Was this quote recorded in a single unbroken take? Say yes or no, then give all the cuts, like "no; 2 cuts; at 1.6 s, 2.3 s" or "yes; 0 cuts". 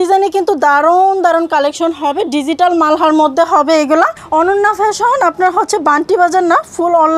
no; 1 cut; at 4.2 s